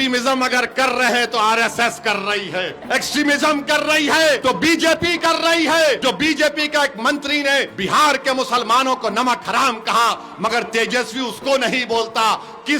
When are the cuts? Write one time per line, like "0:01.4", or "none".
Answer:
0:02.8
0:04.4
0:06.0
0:07.7